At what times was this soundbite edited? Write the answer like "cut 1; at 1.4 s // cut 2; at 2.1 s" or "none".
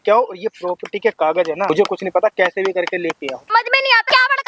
cut 1; at 1.7 s // cut 2; at 3.7 s